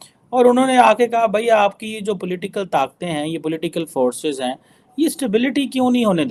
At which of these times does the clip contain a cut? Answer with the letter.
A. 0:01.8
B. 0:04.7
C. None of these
C